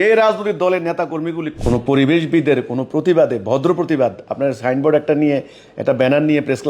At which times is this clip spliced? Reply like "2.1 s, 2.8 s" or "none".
1.5 s